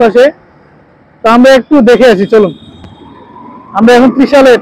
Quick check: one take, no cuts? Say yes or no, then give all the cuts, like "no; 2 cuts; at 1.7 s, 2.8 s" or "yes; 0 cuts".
yes; 0 cuts